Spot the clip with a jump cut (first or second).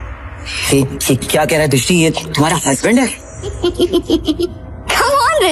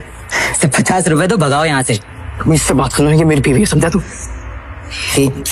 first